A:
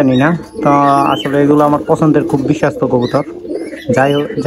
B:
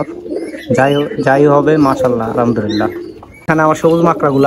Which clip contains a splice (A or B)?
B